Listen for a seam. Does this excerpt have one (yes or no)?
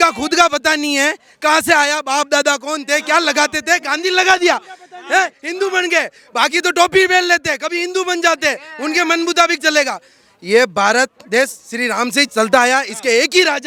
no